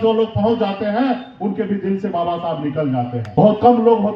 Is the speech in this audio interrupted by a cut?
yes; 1 cut; at 3.2 s

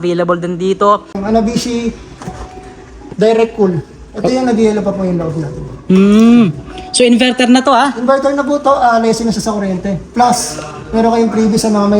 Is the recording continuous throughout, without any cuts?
no; 1 cut; at 1.2 s

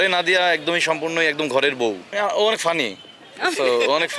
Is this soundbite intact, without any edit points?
yes; 0 cuts

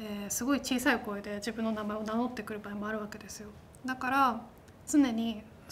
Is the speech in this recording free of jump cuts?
yes; 0 cuts

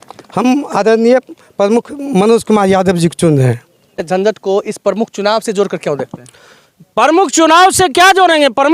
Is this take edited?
yes; 1 cut; at 4.0 s

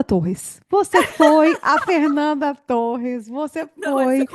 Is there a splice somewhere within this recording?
no; 0 cuts

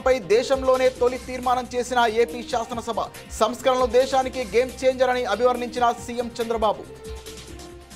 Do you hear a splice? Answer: no; 0 cuts

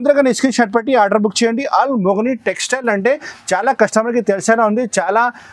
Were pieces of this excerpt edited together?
no; 0 cuts

